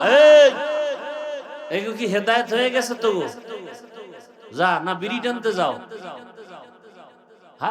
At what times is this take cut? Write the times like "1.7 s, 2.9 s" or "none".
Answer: none